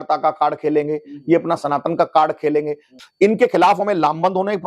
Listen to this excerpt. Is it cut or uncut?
cut